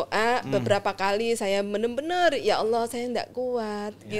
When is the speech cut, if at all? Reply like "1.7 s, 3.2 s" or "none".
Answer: none